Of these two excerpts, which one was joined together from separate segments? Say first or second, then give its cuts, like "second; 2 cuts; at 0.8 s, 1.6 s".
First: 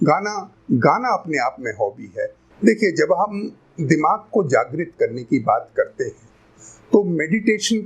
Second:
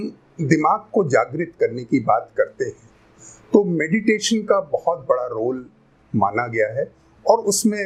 first; 1 cut; at 2.4 s